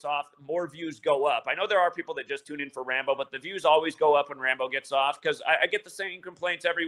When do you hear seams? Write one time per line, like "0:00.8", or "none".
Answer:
none